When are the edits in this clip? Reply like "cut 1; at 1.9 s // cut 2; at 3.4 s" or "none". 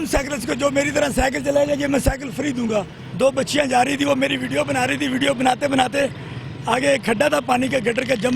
cut 1; at 3.0 s